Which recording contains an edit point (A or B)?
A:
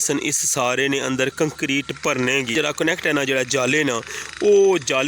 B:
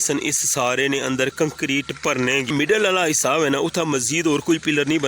B